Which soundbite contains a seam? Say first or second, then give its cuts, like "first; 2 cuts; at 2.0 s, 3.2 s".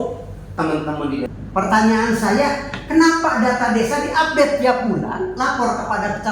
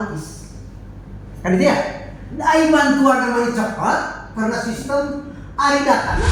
first; 1 cut; at 1.3 s